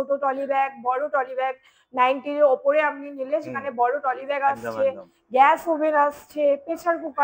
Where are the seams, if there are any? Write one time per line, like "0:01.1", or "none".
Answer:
none